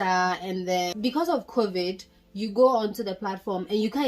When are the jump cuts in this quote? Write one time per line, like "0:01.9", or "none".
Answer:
0:00.9